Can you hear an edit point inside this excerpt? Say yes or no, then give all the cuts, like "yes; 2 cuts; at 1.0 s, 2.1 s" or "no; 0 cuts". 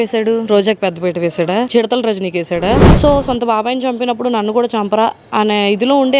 yes; 1 cut; at 2.9 s